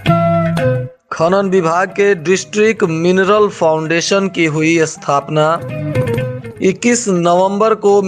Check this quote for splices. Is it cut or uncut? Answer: cut